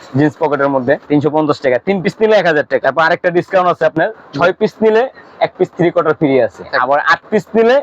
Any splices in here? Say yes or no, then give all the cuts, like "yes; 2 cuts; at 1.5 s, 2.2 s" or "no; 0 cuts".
yes; 3 cuts; at 1.0 s, 2.8 s, 6.7 s